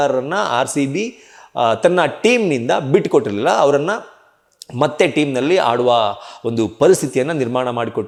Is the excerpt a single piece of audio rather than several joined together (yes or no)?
yes